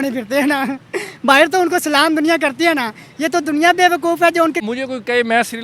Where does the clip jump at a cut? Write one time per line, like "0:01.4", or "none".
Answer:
0:04.6